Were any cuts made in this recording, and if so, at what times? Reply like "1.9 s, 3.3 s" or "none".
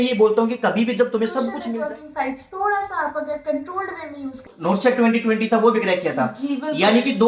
1.6 s, 4.5 s